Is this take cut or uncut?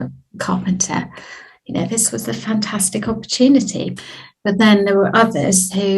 cut